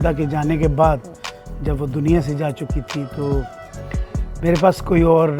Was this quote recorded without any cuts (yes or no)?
yes